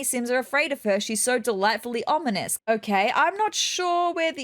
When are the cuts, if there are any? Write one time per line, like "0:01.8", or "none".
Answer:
0:02.5